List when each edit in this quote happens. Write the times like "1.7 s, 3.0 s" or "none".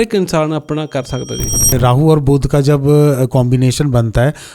1.7 s